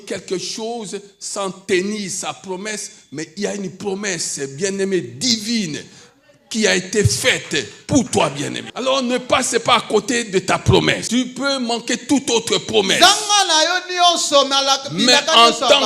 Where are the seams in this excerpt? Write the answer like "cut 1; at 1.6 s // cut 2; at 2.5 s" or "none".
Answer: cut 1; at 8.6 s // cut 2; at 11.0 s

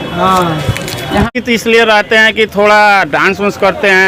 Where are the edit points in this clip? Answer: cut 1; at 1.3 s

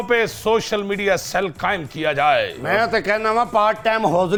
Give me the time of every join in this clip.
none

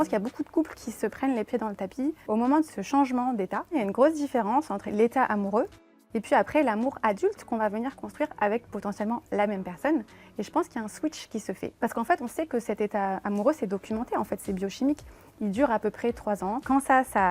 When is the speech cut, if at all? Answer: cut 1; at 2.5 s // cut 2; at 3.7 s // cut 3; at 4.9 s // cut 4; at 11.7 s // cut 5; at 16.6 s

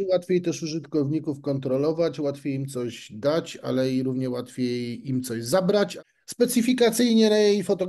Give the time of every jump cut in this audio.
cut 1; at 6.0 s

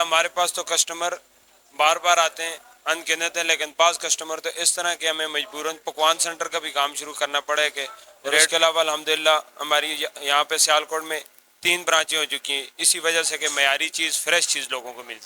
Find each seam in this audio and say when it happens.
cut 1; at 8.5 s

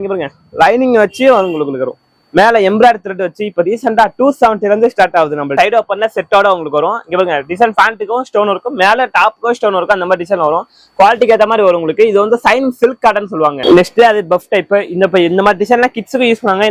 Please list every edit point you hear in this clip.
cut 1; at 5.5 s // cut 2; at 13.6 s

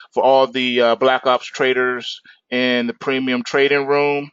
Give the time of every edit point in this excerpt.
cut 1; at 2.8 s

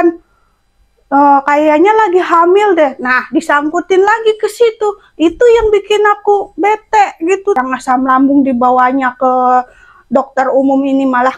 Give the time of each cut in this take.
cut 1; at 7.6 s

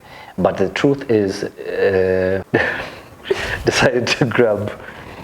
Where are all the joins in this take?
cut 1; at 2.5 s

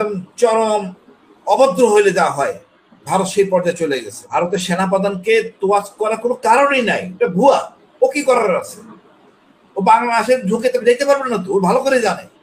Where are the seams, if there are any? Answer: cut 1; at 4.3 s

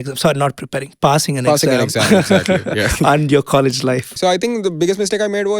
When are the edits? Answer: cut 1; at 4.1 s

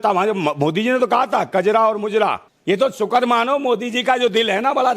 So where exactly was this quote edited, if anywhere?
cut 1; at 2.5 s

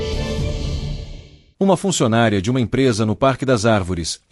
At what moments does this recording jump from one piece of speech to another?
none

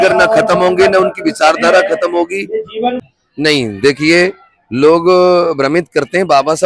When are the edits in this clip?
cut 1; at 3.0 s

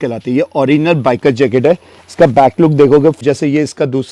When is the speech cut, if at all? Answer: cut 1; at 3.2 s

